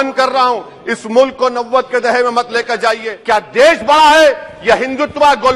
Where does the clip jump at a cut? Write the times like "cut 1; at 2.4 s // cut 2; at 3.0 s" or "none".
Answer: cut 1; at 3.1 s

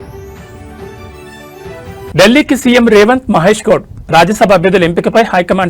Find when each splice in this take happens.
cut 1; at 2.1 s

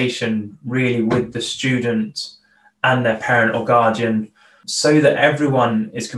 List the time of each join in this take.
cut 1; at 4.6 s

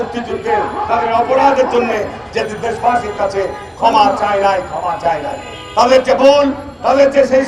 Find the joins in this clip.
none

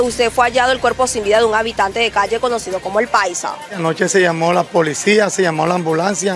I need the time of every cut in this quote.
cut 1; at 3.8 s

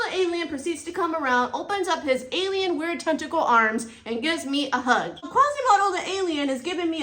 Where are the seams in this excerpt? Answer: cut 1; at 5.2 s

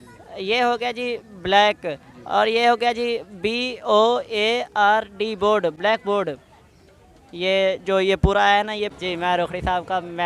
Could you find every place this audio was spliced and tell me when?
cut 1; at 9.0 s

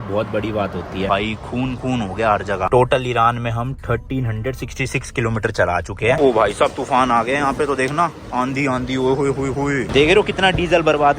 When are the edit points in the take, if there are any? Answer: cut 1; at 1.1 s // cut 2; at 2.7 s // cut 3; at 6.2 s // cut 4; at 9.9 s

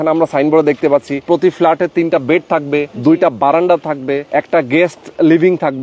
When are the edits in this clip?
cut 1; at 1.2 s // cut 2; at 2.9 s // cut 3; at 4.2 s

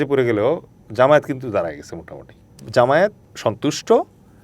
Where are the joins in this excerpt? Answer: cut 1; at 2.6 s // cut 2; at 3.3 s

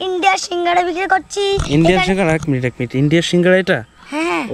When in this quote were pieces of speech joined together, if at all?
none

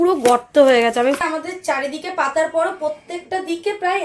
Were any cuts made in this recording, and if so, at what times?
cut 1; at 1.2 s

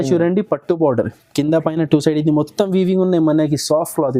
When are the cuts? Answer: none

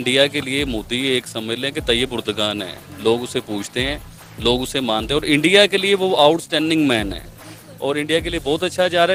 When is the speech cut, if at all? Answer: none

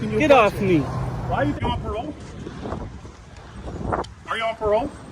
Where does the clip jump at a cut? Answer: cut 1; at 1.6 s

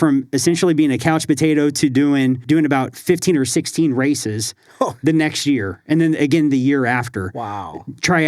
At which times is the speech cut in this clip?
cut 1; at 2.4 s

